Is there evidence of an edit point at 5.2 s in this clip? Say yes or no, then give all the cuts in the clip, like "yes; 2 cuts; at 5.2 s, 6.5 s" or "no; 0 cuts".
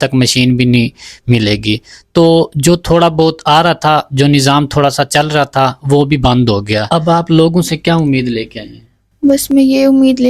no; 1 cut; at 6.8 s